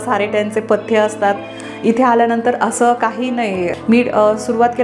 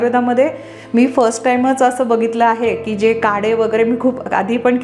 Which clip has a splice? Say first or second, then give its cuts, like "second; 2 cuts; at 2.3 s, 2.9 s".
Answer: first; 1 cut; at 3.7 s